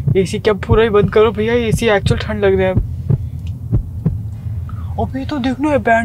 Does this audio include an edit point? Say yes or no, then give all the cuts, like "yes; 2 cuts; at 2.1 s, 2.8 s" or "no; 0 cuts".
no; 0 cuts